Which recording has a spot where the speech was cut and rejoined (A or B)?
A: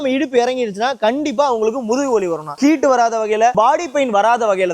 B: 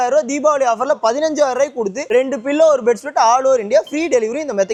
A